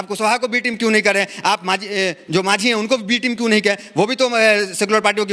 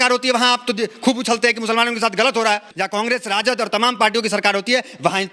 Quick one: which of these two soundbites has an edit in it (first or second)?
second